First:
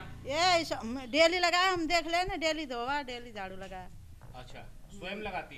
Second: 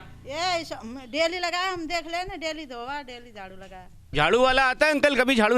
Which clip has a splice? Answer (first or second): second